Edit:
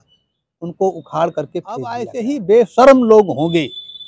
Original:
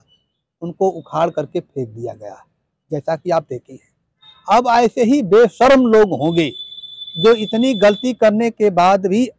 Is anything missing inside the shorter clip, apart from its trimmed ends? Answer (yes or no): yes